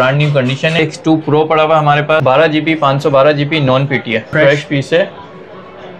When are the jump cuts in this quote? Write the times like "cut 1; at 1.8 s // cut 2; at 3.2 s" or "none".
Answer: cut 1; at 0.8 s // cut 2; at 2.2 s // cut 3; at 4.3 s